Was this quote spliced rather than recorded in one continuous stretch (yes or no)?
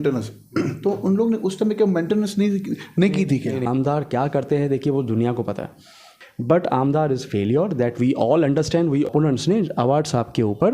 yes